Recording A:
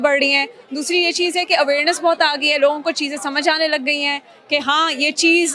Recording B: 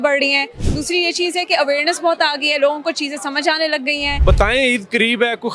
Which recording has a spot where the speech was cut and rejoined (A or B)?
B